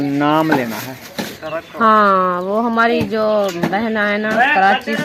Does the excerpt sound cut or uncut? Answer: uncut